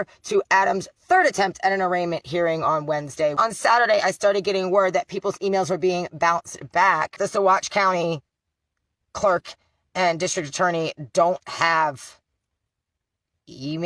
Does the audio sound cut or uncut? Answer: cut